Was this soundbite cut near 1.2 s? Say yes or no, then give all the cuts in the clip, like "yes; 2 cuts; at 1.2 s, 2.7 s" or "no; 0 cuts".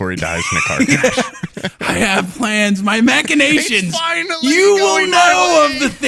no; 0 cuts